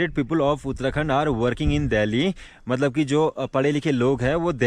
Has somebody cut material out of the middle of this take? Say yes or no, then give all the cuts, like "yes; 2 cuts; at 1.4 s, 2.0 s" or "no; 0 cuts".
no; 0 cuts